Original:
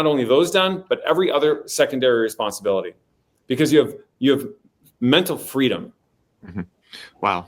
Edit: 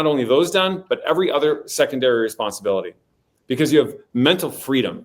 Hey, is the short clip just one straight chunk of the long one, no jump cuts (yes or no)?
no